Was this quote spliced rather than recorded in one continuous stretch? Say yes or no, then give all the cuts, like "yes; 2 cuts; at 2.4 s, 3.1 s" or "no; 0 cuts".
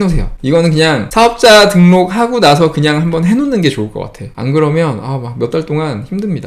no; 0 cuts